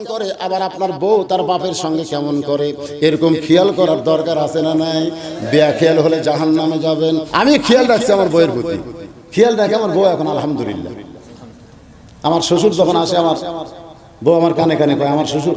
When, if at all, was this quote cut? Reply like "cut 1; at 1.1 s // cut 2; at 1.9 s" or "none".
cut 1; at 7.3 s